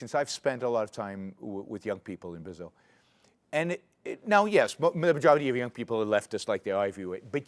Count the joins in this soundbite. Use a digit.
0